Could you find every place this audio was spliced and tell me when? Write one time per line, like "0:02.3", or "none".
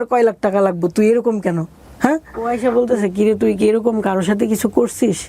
0:02.5